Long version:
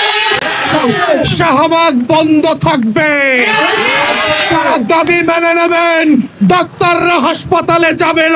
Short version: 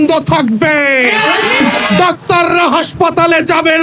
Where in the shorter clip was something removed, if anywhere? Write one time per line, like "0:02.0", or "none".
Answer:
0:01.8